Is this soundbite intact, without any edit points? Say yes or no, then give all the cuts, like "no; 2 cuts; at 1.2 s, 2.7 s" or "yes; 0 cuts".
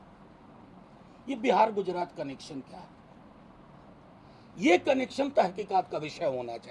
yes; 0 cuts